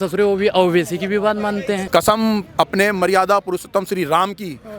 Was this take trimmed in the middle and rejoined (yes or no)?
yes